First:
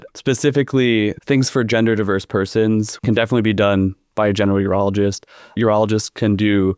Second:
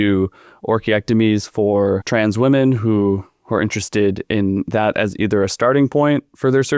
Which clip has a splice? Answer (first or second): first